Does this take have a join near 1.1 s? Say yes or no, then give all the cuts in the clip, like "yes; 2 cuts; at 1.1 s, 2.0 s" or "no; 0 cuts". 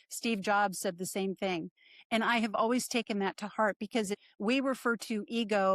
no; 1 cut; at 4.2 s